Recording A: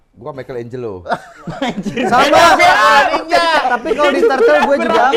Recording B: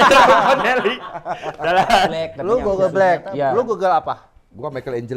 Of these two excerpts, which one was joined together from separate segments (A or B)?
B